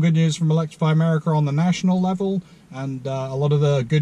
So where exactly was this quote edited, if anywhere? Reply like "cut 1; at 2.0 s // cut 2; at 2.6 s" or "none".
none